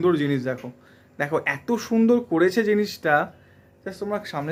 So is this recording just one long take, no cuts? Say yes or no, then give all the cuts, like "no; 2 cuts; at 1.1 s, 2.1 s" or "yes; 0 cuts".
yes; 0 cuts